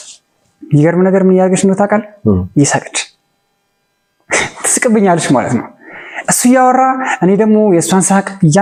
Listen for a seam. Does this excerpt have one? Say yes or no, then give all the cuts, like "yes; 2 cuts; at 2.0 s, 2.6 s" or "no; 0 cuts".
no; 0 cuts